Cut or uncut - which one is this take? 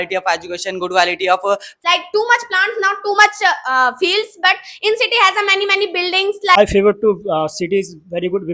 cut